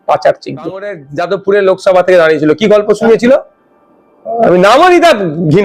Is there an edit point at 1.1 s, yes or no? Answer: yes